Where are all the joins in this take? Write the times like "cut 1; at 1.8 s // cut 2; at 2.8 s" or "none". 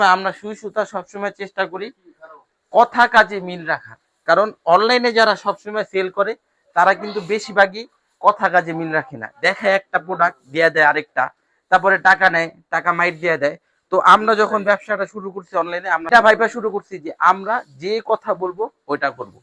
cut 1; at 16.1 s